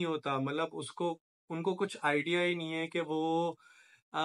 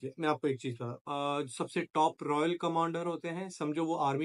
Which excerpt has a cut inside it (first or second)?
second